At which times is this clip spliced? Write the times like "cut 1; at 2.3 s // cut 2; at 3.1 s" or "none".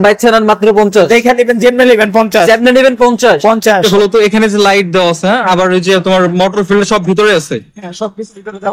cut 1; at 3.8 s